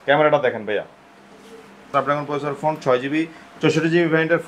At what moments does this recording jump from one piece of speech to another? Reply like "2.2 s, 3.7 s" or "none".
1.8 s

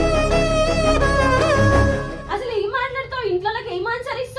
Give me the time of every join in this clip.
2.2 s

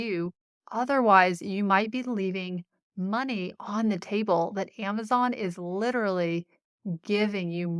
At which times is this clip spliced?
none

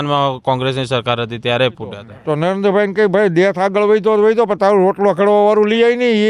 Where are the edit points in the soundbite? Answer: 2.1 s

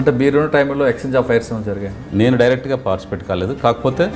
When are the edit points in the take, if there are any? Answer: 1.9 s

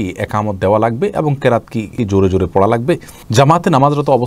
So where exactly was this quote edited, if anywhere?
1.9 s, 3.2 s

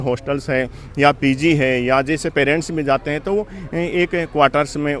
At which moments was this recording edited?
none

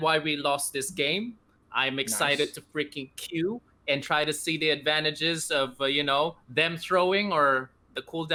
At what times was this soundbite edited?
none

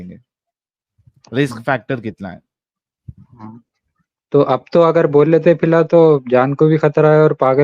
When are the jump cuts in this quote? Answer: 3.2 s

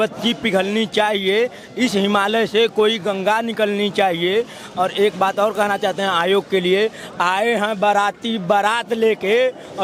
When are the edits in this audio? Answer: none

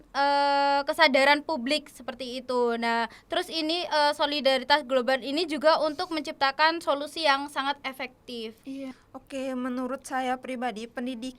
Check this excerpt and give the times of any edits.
8.9 s

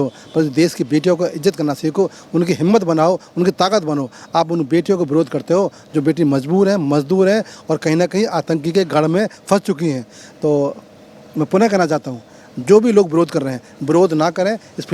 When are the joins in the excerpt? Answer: none

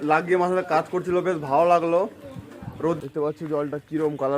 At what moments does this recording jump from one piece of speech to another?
3.0 s

